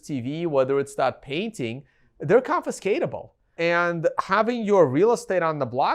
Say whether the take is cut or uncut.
cut